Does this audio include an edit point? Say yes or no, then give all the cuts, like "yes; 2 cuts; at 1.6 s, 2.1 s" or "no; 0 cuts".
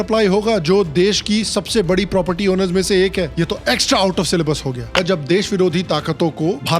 yes; 1 cut; at 4.9 s